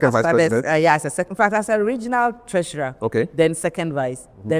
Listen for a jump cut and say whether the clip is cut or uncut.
uncut